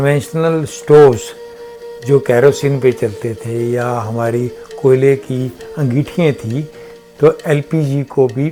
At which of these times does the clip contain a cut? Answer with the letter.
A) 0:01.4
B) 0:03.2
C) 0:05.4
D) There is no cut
D